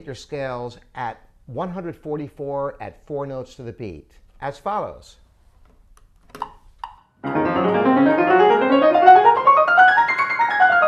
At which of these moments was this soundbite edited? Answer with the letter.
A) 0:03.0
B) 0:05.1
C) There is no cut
C